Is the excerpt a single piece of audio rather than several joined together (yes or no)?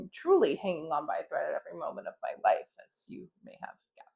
yes